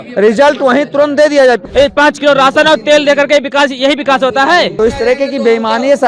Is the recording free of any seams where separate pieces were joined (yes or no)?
no